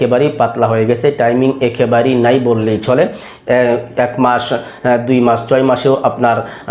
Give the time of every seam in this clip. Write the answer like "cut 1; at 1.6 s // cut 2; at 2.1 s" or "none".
none